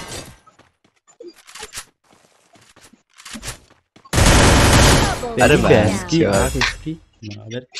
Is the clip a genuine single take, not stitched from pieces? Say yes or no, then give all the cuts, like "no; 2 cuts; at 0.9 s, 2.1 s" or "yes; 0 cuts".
yes; 0 cuts